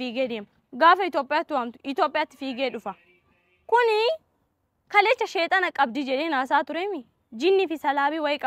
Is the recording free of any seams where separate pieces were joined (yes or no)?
yes